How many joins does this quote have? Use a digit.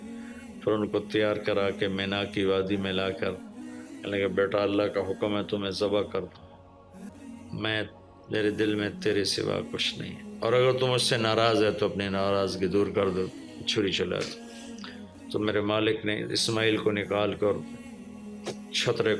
1